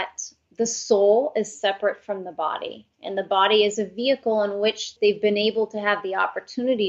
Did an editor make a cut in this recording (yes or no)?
yes